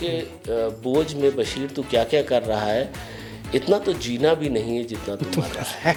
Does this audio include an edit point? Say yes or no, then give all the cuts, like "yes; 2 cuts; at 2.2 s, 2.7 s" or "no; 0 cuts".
no; 0 cuts